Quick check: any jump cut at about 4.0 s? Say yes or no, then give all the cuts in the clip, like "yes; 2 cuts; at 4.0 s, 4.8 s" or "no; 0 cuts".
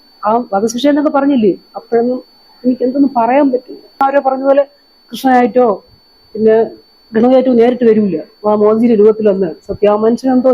yes; 1 cut; at 4.0 s